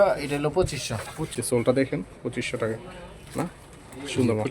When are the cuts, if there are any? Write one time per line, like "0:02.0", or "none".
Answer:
0:01.3